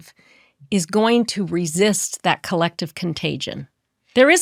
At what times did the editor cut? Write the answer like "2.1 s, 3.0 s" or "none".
none